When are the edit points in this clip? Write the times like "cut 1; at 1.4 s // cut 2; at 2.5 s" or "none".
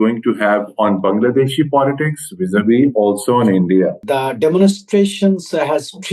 cut 1; at 4.0 s